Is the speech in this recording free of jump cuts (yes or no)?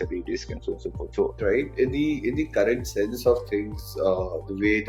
no